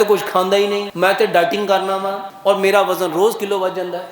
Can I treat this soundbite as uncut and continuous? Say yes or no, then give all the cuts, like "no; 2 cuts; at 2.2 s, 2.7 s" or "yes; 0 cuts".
no; 2 cuts; at 0.9 s, 2.2 s